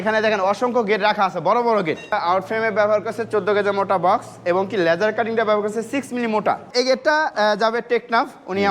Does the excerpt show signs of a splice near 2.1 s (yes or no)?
yes